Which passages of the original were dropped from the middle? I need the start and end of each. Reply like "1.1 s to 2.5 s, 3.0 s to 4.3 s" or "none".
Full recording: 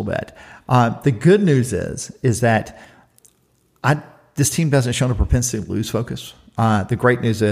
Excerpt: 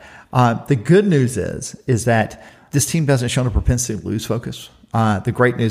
2.9 s to 4.2 s